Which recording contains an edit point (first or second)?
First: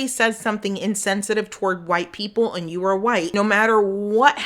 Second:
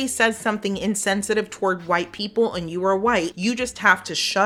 first